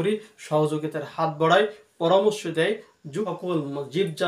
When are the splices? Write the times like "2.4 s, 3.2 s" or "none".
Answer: 3.1 s